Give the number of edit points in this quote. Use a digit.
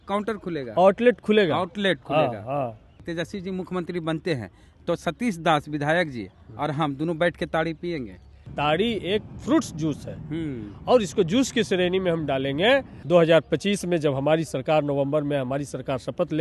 3